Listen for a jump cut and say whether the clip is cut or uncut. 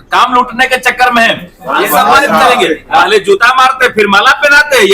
cut